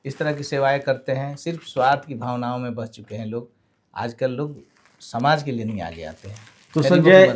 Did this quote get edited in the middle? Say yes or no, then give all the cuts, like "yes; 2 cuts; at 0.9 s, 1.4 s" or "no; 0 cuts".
no; 0 cuts